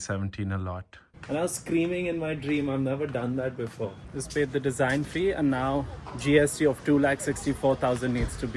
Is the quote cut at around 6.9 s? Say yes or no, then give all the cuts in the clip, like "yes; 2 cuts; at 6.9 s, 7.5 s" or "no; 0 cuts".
no; 2 cuts; at 1.1 s, 3.9 s